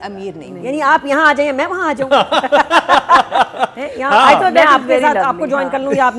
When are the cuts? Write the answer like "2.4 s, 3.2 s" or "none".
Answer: none